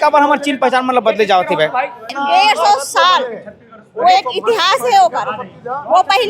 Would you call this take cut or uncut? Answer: cut